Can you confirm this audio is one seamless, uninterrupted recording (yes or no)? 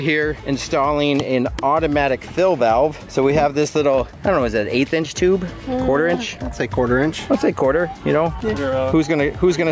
yes